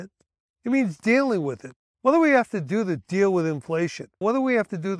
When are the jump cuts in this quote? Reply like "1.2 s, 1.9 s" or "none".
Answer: 4.0 s